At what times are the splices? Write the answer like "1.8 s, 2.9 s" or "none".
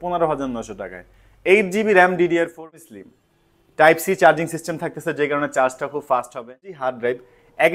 2.7 s, 6.8 s